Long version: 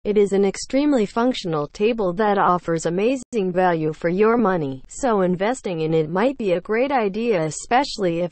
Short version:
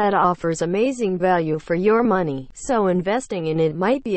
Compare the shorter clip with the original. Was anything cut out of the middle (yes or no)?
yes